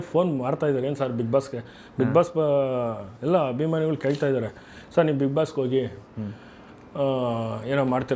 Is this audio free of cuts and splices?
yes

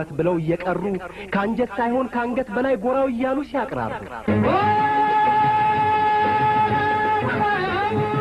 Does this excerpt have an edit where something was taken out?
no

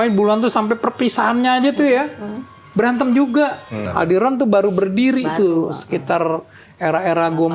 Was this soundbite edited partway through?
yes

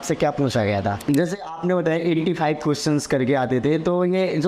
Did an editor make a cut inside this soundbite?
yes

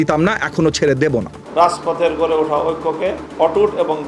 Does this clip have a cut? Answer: yes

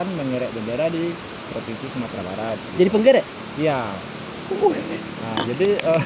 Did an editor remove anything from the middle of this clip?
no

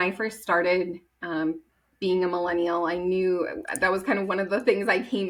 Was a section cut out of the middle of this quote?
no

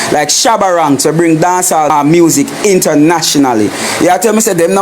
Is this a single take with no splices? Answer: no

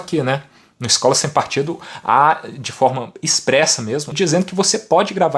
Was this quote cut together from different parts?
yes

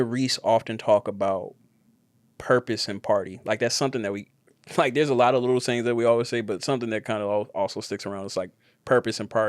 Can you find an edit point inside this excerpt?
no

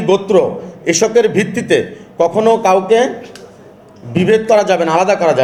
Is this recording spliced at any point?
no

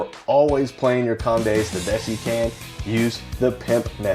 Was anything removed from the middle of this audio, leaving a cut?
yes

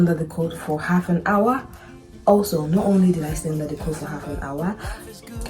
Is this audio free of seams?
yes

